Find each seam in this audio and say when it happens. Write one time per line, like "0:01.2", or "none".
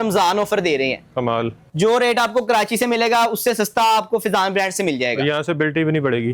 0:01.7